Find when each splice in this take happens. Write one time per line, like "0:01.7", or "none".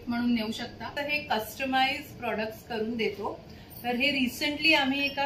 0:01.0

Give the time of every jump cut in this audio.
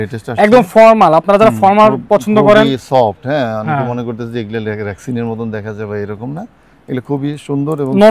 none

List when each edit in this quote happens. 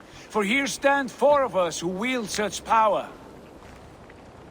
0:03.6

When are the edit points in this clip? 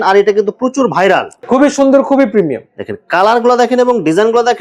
0:01.4

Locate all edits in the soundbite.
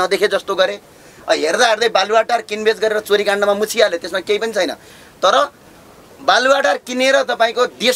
none

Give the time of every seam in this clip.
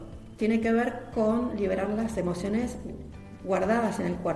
0:03.2

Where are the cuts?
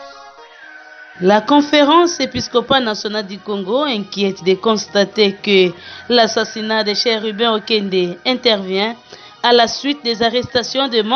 0:01.1

